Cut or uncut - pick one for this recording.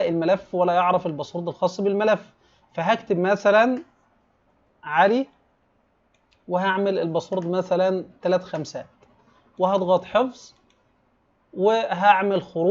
uncut